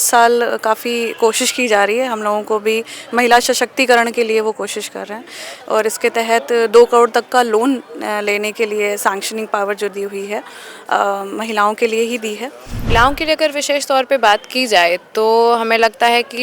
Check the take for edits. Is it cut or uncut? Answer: cut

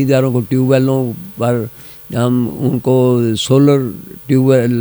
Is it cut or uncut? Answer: uncut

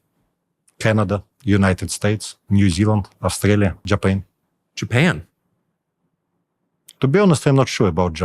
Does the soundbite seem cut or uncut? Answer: cut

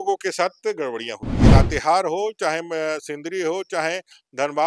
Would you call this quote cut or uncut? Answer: cut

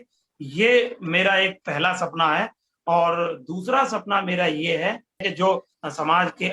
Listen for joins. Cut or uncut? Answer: cut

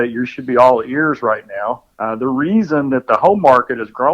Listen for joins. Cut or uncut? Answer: cut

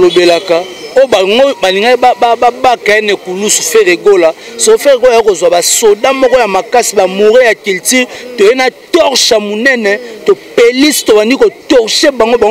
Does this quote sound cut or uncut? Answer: uncut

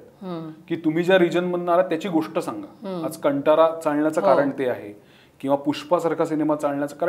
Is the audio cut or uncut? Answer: uncut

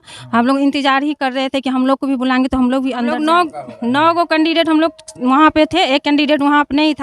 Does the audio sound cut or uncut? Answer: cut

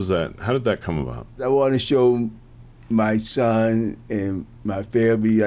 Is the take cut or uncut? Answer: cut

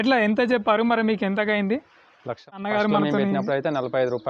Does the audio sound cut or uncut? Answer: cut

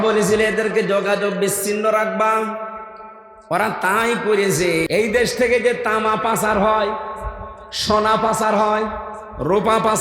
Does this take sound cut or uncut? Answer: cut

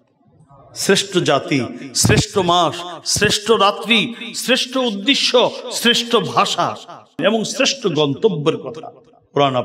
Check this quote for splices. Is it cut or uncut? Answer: cut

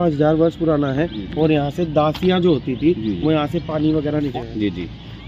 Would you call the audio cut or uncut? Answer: cut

